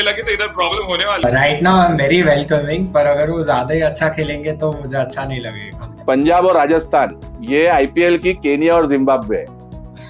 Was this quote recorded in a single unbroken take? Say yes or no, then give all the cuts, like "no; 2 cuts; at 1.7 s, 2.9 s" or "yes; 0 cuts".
no; 2 cuts; at 1.2 s, 5.9 s